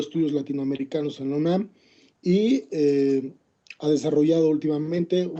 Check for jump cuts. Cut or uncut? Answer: uncut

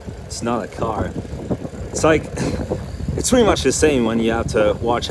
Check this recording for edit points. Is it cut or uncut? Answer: uncut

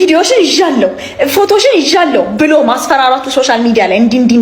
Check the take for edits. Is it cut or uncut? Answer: uncut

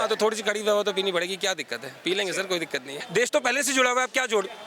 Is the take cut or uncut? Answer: cut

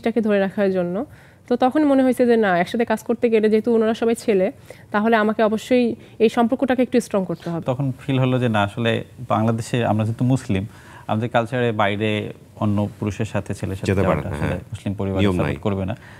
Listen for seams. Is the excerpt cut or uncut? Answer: uncut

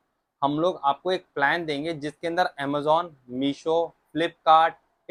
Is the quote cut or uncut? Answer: uncut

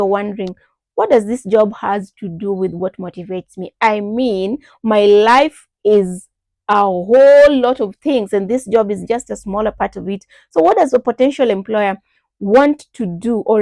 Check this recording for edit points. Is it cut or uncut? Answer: uncut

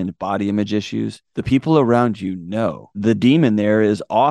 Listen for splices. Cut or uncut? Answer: cut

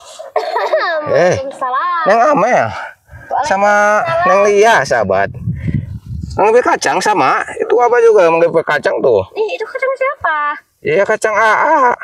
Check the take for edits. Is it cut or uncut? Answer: uncut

